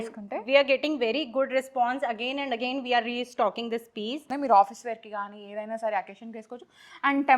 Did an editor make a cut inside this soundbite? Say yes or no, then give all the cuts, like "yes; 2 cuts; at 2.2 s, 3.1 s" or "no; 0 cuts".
yes; 1 cut; at 4.3 s